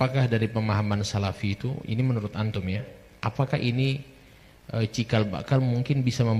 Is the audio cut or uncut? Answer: uncut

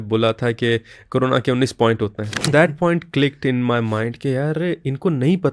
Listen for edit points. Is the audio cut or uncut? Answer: cut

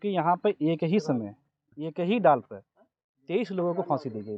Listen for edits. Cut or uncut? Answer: uncut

